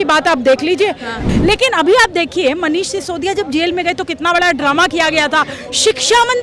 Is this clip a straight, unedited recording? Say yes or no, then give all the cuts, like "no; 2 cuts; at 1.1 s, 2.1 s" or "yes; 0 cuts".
no; 1 cut; at 1.2 s